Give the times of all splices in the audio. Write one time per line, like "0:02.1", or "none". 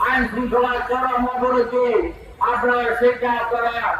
none